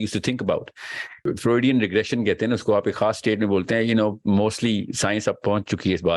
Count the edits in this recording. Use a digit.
1